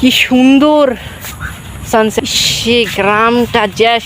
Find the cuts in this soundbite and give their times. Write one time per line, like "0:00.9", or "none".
0:02.2